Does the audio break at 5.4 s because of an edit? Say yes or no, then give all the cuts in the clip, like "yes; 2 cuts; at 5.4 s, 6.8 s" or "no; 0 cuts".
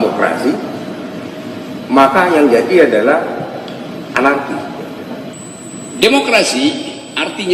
yes; 1 cut; at 5.4 s